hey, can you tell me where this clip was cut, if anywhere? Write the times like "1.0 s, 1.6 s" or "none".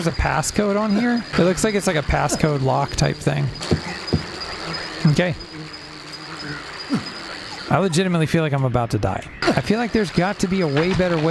1.3 s, 3.6 s, 9.4 s